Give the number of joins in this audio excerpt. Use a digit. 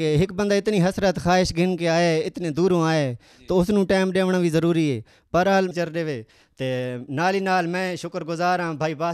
1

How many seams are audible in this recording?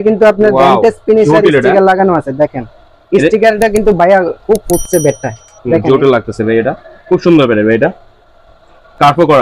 0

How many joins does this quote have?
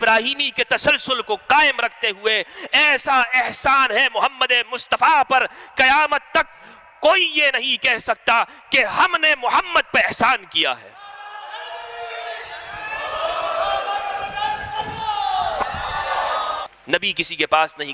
1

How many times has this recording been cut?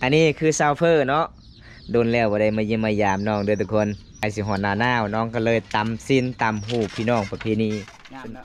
1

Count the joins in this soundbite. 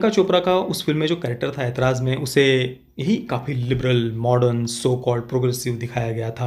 0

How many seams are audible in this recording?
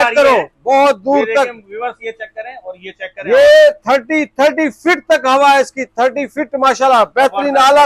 0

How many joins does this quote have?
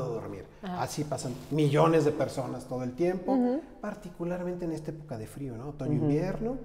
0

